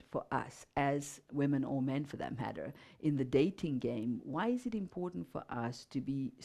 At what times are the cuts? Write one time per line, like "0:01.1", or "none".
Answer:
0:01.2